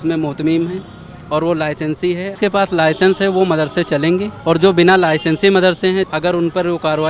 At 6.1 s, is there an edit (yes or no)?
yes